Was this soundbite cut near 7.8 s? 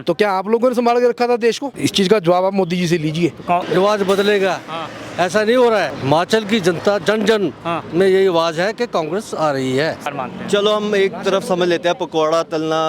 no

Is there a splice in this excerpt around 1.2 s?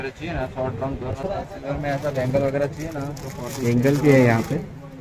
yes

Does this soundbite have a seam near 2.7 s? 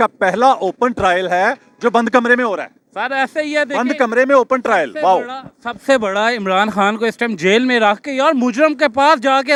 no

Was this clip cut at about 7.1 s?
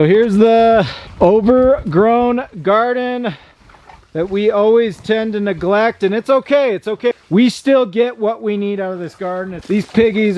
yes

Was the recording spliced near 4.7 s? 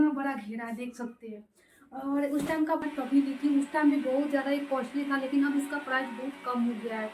no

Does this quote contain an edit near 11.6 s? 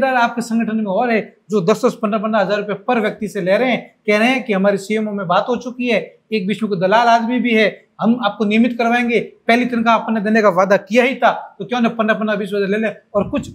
no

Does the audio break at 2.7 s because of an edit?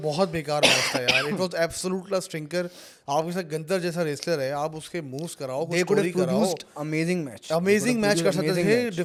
no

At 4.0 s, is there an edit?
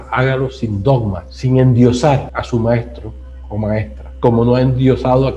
yes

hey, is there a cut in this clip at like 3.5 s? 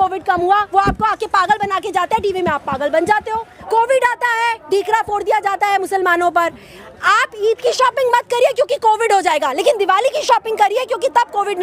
yes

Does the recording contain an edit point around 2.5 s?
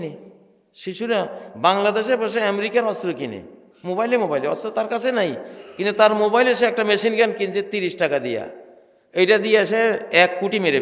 no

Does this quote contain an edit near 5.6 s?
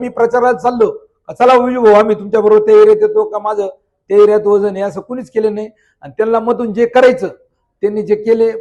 no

